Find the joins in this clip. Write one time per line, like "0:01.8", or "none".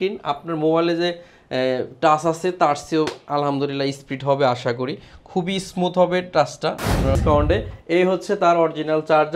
0:07.2